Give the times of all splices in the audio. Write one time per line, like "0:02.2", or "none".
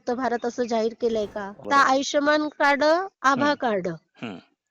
0:01.6